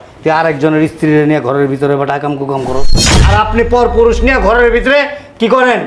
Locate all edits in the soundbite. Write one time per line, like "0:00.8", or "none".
0:03.0